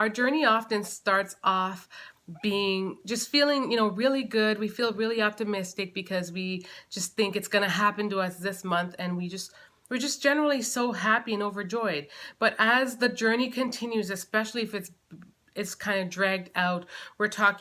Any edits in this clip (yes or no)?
no